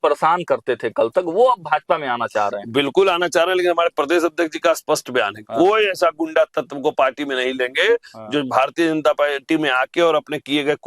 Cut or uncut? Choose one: uncut